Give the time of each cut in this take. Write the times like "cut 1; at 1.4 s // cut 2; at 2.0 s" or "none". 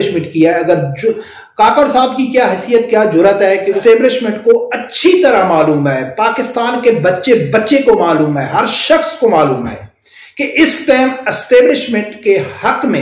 cut 1; at 3.8 s

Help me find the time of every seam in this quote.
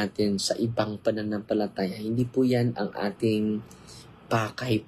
none

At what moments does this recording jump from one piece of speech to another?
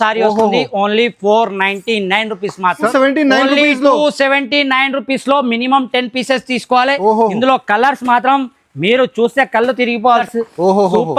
cut 1; at 2.9 s // cut 2; at 10.2 s

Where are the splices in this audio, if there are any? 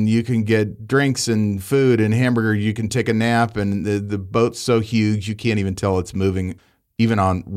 none

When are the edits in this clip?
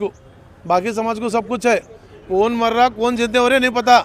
cut 1; at 2.2 s

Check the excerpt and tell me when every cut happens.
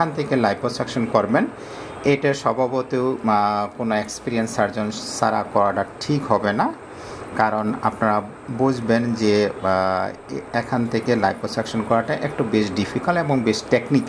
none

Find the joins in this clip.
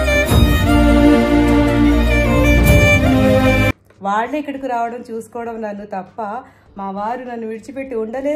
none

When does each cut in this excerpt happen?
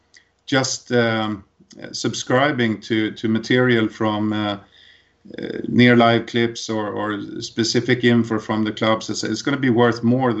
none

